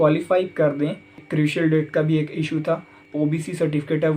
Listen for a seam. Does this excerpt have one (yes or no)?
yes